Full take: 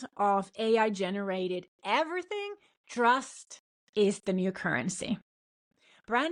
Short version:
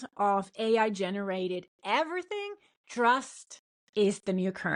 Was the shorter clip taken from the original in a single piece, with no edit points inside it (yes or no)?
yes